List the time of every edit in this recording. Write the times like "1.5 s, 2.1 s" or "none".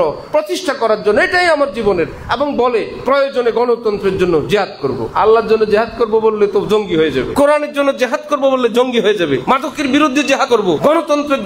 5.1 s, 7.3 s, 9.4 s, 10.6 s

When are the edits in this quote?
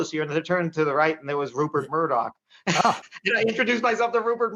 none

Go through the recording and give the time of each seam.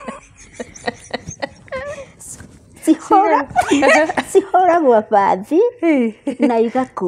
none

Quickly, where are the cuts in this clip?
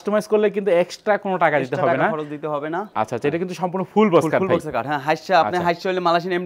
none

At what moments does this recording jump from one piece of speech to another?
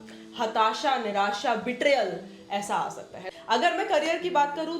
3.2 s

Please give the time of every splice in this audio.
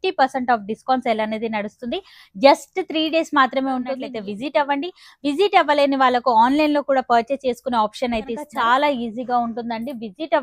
4.0 s, 8.5 s

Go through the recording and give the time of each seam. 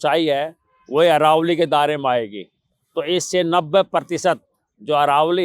none

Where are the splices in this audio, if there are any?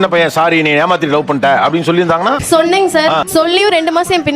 none

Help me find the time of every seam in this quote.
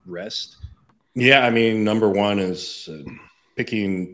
0.9 s

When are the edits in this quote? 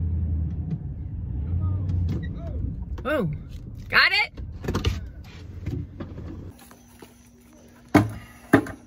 none

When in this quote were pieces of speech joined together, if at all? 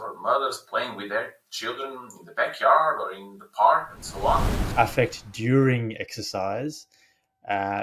4.6 s

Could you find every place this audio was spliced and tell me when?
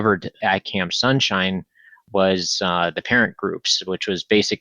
none

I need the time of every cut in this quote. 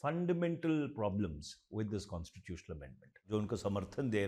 3.2 s

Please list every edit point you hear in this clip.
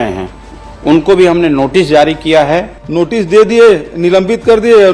2.8 s

